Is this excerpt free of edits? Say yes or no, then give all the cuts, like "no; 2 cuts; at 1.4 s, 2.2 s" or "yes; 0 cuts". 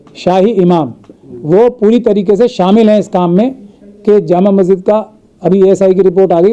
yes; 0 cuts